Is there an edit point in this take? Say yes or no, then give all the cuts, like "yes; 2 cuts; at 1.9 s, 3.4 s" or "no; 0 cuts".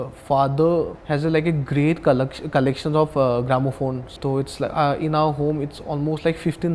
yes; 2 cuts; at 1.0 s, 4.1 s